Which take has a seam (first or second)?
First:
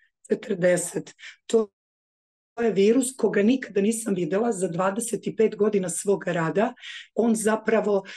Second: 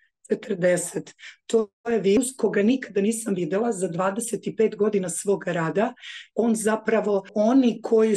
second